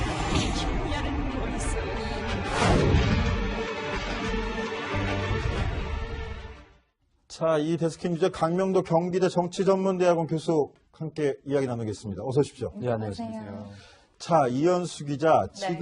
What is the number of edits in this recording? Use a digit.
1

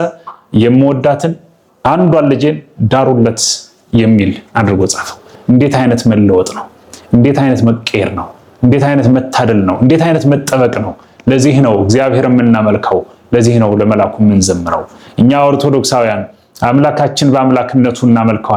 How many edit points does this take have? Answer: 0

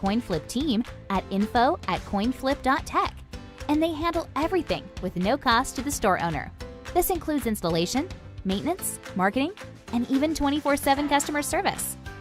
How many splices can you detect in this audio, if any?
1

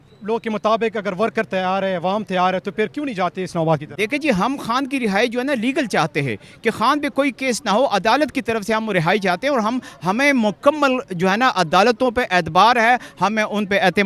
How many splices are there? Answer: 0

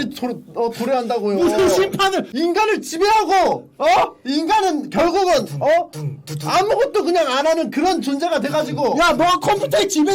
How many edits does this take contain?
1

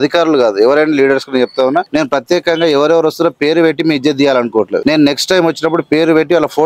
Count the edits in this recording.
2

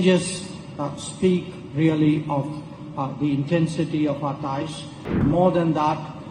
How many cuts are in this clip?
1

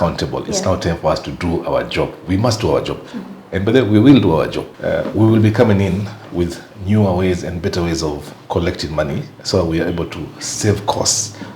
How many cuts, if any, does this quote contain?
1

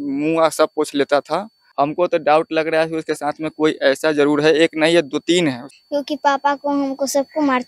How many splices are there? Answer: 2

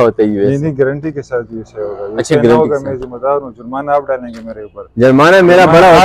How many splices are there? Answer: 0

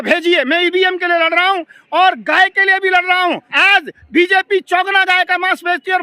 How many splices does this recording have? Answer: 1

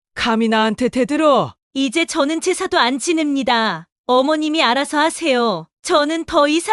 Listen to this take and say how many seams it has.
0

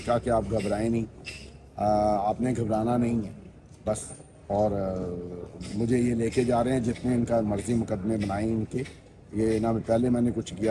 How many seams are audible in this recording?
0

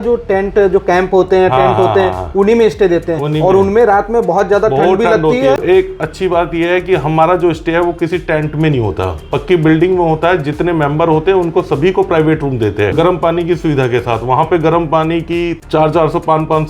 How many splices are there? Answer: 3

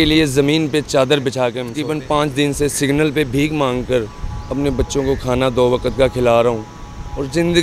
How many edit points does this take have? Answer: 1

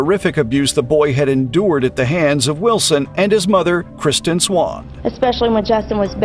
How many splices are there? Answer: 1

